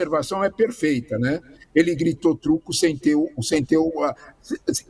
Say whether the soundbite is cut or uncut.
uncut